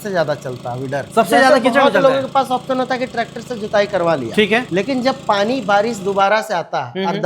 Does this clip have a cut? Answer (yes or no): no